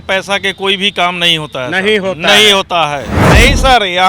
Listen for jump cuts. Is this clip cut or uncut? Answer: cut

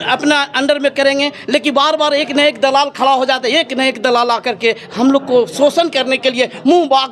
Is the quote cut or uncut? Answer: uncut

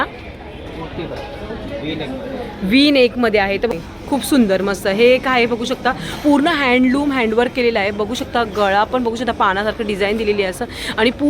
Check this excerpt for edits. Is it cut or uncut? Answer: cut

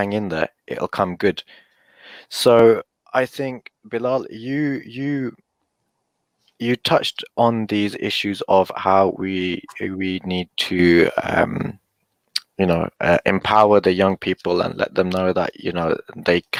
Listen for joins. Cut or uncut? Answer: uncut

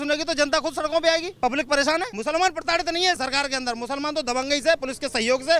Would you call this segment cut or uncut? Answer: cut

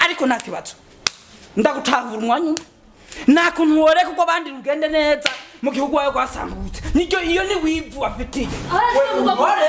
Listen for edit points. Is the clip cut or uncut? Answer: uncut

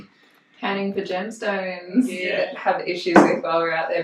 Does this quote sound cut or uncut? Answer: cut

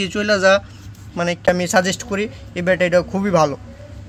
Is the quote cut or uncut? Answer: cut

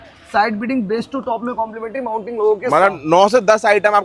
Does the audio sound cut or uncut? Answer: uncut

